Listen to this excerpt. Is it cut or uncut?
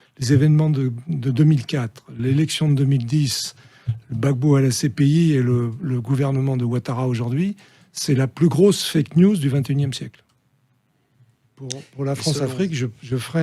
cut